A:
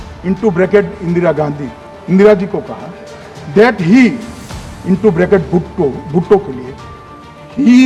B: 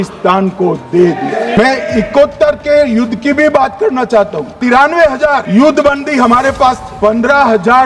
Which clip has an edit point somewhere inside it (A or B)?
B